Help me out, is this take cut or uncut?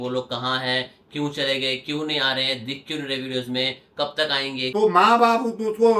cut